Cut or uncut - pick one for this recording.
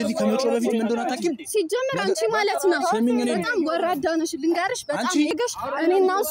cut